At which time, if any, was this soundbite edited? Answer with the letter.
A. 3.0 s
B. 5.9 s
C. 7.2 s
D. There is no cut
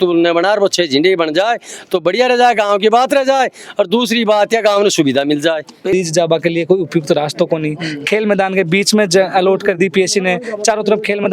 B